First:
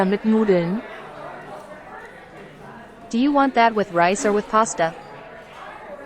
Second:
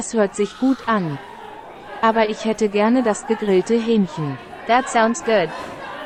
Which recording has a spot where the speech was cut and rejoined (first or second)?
first